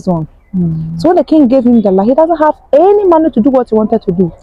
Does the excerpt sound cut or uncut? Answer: uncut